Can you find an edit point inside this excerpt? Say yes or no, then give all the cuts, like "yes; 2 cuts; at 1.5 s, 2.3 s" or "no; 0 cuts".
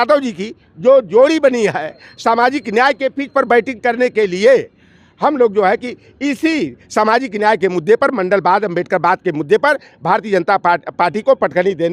no; 0 cuts